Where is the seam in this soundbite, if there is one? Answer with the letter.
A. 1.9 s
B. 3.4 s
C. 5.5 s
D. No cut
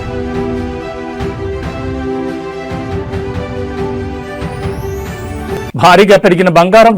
C